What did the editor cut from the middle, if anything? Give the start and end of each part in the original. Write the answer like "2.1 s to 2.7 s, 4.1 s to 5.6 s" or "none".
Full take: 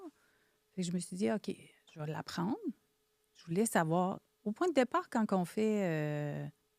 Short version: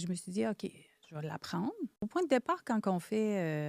2.8 s to 4.4 s